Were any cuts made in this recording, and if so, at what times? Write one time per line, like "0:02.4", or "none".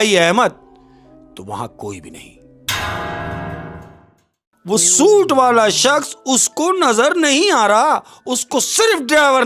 0:03.9